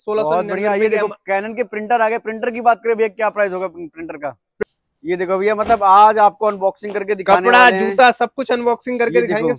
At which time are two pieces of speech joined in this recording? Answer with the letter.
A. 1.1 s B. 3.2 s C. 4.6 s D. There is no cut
C